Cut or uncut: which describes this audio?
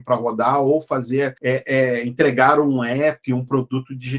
cut